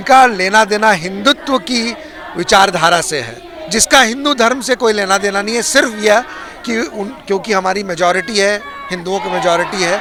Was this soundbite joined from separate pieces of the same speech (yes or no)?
no